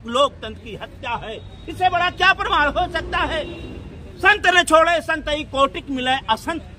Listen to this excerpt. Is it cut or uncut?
uncut